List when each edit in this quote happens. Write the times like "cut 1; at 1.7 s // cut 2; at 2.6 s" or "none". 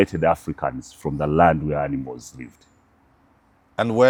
none